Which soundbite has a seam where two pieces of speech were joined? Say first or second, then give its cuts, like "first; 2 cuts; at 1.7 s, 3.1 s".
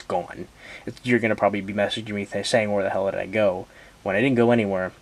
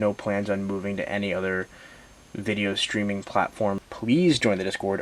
second; 1 cut; at 3.9 s